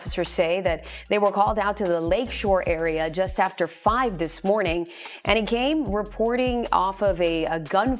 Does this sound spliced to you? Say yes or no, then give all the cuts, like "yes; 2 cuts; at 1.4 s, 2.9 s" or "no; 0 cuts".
no; 0 cuts